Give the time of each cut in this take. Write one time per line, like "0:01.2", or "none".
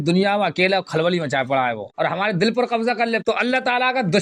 0:01.9